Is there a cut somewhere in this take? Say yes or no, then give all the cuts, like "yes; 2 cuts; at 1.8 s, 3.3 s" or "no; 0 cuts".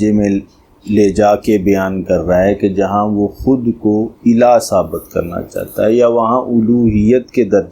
no; 0 cuts